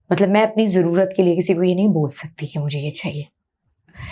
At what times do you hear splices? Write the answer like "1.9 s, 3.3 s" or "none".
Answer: none